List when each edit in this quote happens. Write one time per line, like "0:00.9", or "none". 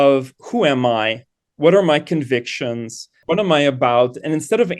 0:03.2